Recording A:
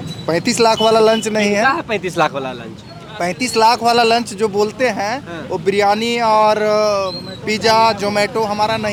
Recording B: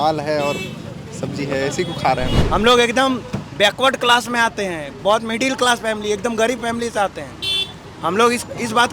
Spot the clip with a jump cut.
B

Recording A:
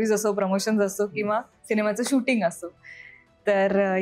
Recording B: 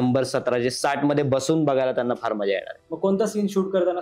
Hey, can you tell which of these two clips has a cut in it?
B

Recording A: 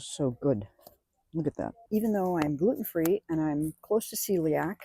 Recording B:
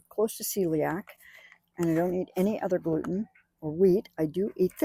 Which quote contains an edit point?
A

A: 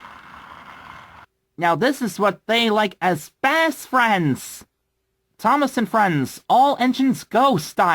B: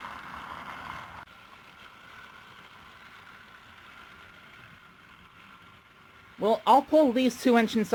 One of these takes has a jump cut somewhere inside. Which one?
A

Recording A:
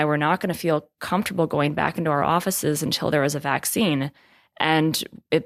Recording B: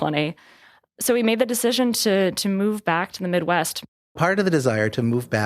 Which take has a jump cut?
B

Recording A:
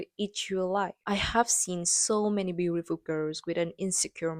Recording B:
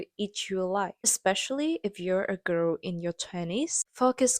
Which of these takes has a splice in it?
B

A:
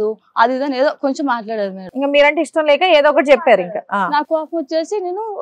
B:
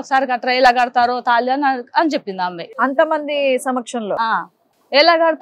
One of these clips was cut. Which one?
B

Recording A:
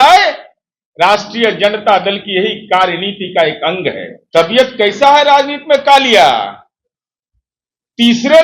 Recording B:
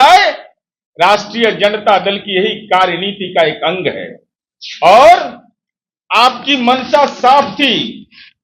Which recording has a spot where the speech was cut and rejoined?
A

